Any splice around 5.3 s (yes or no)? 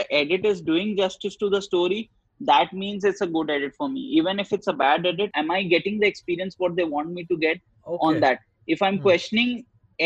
yes